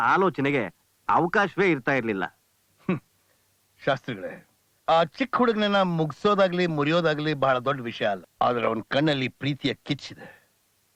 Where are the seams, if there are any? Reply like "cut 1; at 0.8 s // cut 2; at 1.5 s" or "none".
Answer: cut 1; at 8.3 s